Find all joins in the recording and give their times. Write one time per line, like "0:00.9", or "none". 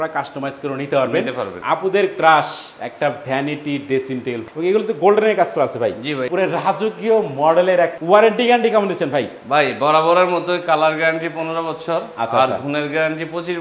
0:01.6
0:04.4
0:06.3
0:07.9